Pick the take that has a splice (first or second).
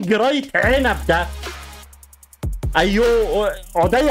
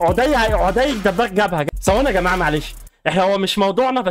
second